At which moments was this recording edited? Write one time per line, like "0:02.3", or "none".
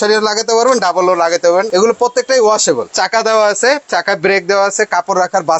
0:01.7
0:02.9

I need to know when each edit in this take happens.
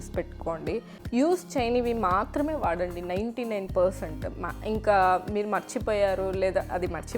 0:00.9

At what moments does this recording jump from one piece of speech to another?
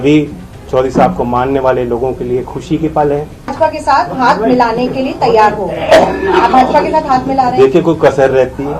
0:03.5

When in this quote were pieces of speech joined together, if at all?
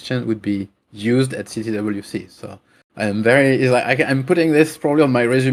none

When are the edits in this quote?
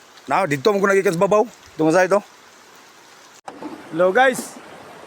0:03.4

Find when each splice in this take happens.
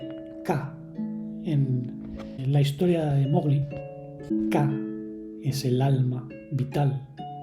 0:04.3

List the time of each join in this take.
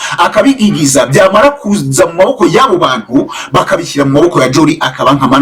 none

